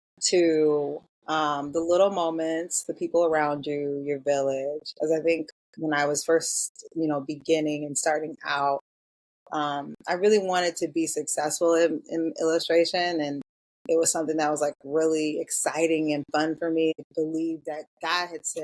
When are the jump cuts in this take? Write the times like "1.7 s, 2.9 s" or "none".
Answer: 16.9 s